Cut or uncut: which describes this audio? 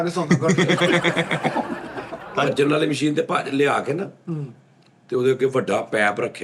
cut